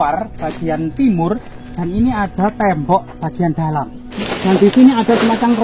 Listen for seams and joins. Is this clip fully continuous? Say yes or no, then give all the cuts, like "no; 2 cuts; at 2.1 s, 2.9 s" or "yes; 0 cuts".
no; 1 cut; at 4.1 s